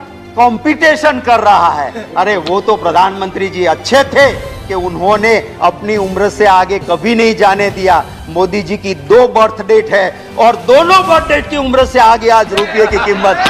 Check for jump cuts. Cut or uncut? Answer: uncut